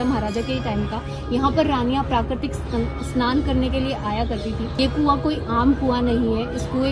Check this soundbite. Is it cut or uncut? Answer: cut